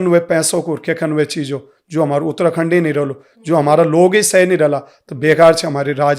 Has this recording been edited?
no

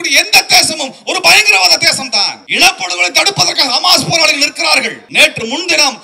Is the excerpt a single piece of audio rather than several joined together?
no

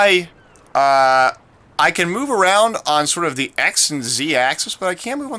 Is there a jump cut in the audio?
no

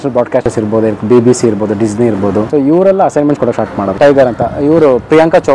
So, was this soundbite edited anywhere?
yes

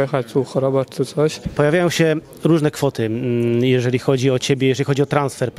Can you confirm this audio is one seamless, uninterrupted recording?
no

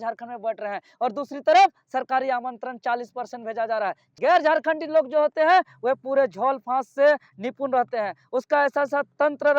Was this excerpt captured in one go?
no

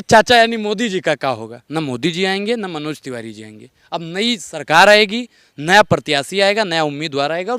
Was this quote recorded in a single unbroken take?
no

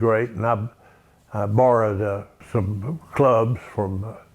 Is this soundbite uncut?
no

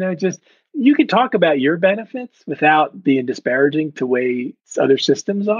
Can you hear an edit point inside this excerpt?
no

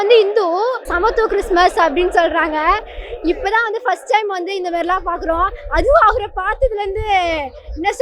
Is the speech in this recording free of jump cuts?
no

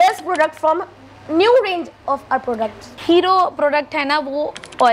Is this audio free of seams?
yes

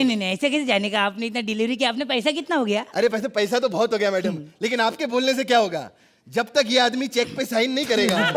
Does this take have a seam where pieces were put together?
no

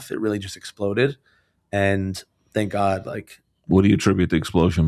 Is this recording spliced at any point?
no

